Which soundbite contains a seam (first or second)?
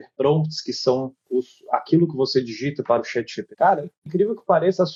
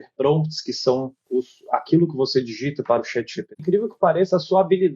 second